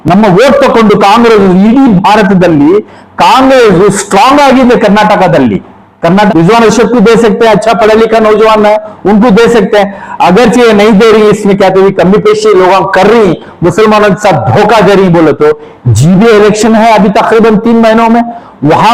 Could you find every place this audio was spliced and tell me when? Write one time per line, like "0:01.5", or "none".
0:06.3